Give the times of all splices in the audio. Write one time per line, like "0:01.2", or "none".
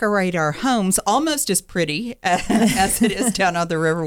none